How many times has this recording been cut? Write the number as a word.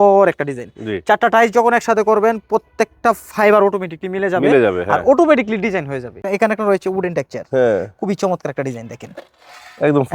one